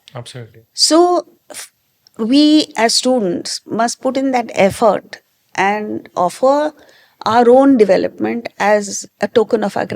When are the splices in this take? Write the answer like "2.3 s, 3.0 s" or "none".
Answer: 9.0 s